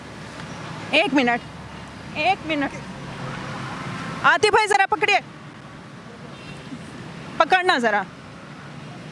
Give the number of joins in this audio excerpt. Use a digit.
0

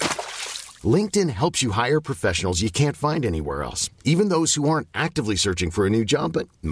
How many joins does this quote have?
0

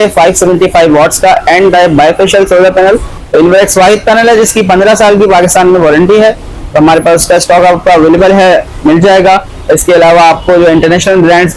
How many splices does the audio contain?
1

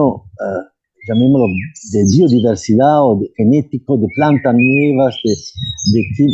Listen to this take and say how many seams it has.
0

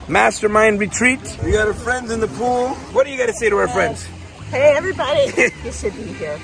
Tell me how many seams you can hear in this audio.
2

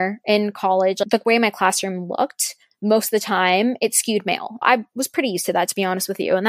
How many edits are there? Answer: 2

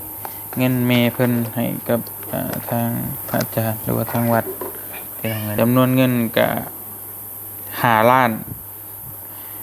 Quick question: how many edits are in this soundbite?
1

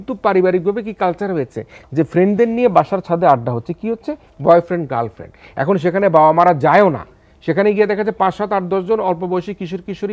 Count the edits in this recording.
0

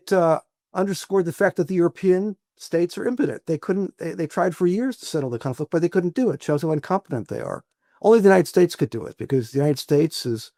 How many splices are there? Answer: 0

